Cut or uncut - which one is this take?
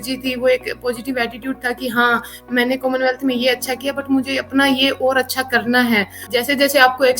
cut